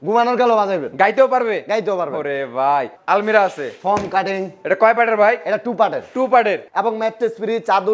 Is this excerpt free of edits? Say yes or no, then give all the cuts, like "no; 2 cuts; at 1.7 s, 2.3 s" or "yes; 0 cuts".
no; 2 cuts; at 2.9 s, 6.6 s